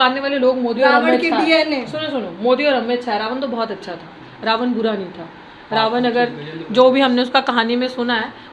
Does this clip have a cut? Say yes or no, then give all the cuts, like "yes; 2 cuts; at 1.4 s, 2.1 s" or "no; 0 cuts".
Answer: no; 0 cuts